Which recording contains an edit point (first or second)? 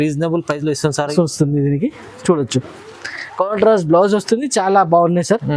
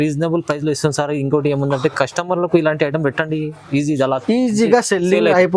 first